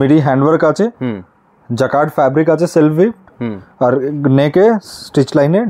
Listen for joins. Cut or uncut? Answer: uncut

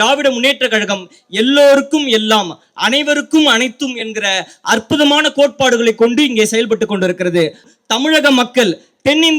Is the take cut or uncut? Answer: cut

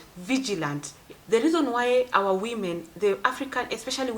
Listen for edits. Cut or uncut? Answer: cut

